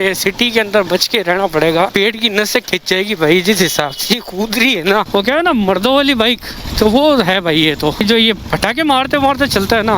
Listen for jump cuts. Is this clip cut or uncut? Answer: cut